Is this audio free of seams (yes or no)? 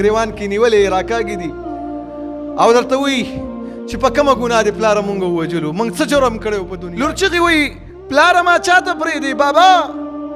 no